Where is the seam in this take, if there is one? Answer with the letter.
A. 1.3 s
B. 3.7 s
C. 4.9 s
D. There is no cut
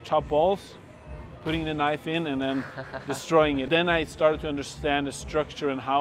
B